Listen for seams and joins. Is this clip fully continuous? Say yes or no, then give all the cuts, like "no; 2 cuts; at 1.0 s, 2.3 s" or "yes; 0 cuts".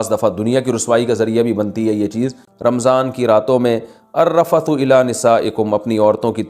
no; 1 cut; at 2.4 s